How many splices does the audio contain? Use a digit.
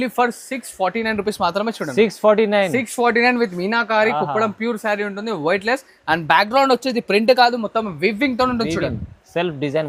0